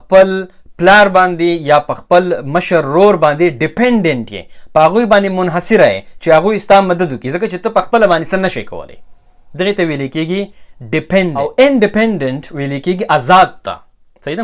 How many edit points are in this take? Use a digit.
1